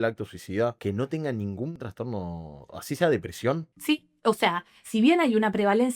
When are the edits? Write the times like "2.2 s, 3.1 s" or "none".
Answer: 0.8 s, 1.7 s, 3.7 s